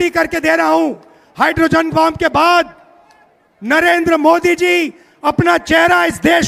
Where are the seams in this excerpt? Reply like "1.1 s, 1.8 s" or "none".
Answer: none